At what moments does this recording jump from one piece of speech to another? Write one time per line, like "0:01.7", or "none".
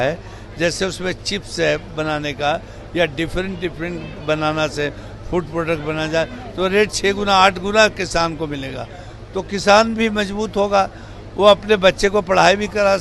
none

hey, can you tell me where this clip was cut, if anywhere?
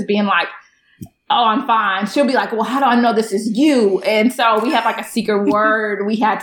none

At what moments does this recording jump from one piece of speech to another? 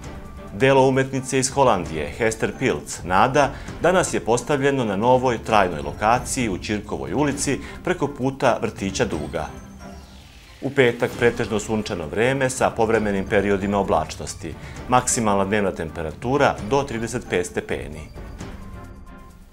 0:18.5

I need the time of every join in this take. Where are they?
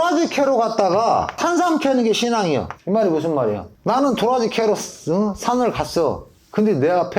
0:01.4
0:02.8
0:03.7

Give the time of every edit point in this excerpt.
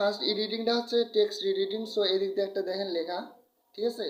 none

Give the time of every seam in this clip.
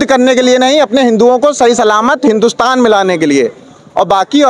none

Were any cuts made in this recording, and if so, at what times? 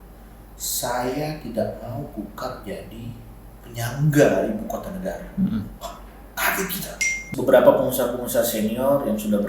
0:07.3

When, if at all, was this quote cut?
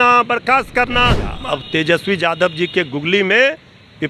0:01.3

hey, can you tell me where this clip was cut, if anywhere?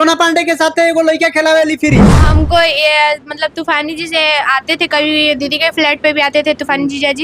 0:02.2

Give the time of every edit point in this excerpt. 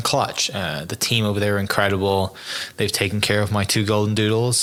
none

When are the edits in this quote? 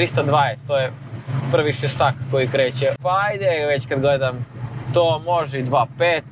0:03.0

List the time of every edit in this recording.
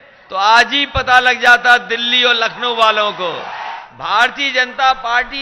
0:03.7

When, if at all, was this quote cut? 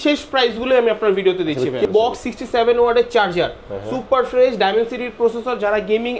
0:01.9

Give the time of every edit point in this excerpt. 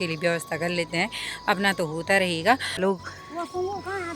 0:02.8

